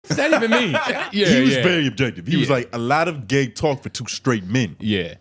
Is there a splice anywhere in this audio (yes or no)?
yes